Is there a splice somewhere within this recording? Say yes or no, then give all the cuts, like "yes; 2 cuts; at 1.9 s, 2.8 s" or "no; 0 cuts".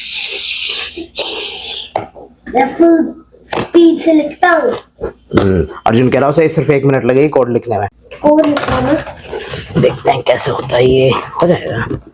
yes; 1 cut; at 7.9 s